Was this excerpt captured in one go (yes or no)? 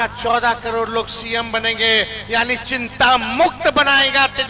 yes